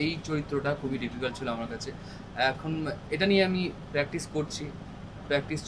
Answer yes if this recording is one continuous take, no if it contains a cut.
yes